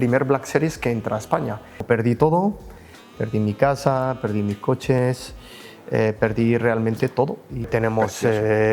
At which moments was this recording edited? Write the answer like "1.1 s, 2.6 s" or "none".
1.8 s, 7.7 s